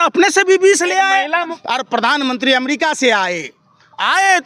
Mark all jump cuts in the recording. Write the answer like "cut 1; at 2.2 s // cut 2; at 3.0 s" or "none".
cut 1; at 1.6 s